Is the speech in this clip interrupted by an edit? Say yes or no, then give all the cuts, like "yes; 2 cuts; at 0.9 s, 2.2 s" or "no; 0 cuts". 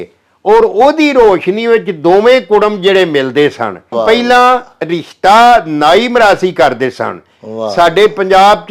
yes; 1 cut; at 4.0 s